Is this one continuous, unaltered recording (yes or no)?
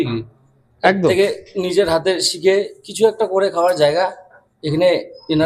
yes